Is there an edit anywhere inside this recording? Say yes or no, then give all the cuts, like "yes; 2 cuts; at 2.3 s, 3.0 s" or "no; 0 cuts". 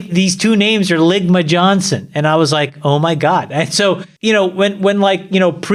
no; 0 cuts